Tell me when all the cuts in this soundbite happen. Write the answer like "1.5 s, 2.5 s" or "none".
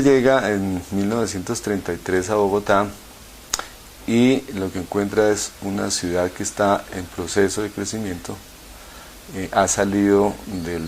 3.5 s